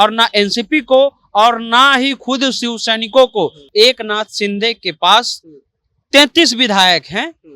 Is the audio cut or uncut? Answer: cut